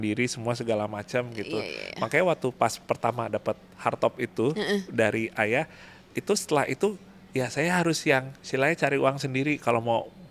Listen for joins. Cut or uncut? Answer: uncut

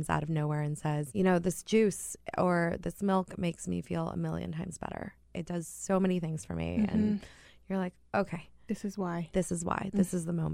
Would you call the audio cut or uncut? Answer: cut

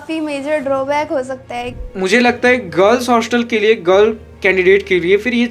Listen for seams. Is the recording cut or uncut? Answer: cut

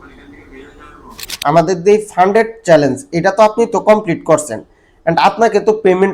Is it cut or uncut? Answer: cut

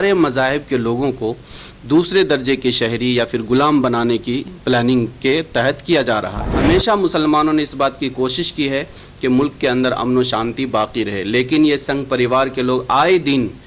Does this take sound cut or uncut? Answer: cut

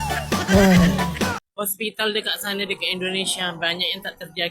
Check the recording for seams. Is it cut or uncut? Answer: cut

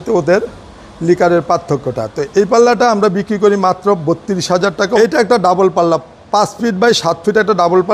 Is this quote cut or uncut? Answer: cut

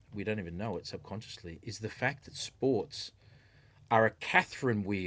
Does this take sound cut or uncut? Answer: uncut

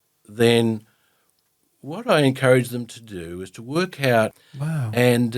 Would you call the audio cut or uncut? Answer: cut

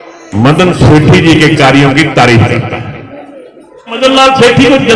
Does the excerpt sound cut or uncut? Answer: cut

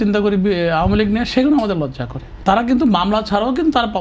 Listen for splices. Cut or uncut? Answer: cut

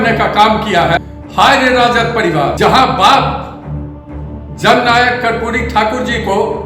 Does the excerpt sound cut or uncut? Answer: cut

